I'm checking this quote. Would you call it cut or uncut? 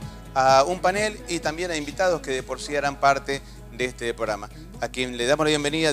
uncut